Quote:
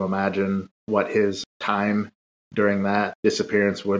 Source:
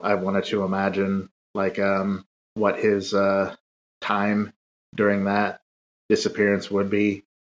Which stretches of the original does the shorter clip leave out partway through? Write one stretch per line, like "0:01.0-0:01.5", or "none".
0:01.6-0:03.4
0:05.5-0:06.0